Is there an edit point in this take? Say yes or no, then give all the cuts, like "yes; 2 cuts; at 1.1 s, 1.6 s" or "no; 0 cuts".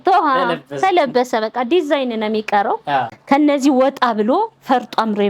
yes; 1 cut; at 3.1 s